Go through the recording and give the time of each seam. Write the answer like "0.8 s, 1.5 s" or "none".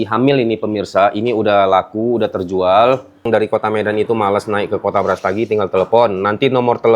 3.2 s